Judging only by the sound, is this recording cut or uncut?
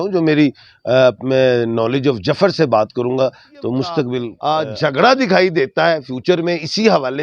cut